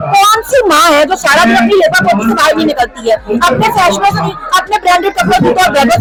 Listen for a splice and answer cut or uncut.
uncut